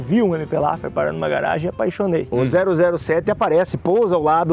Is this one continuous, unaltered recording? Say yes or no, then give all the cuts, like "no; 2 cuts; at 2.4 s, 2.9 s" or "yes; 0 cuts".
no; 1 cut; at 2.3 s